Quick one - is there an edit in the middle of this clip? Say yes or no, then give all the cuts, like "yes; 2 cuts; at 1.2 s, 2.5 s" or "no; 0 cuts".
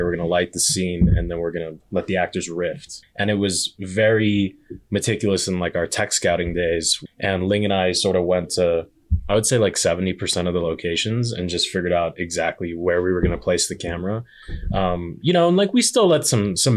yes; 2 cuts; at 2.9 s, 7.0 s